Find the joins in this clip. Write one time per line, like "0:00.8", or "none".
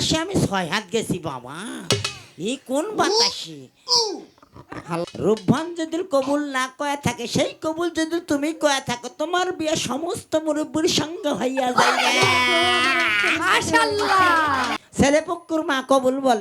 0:05.0
0:14.8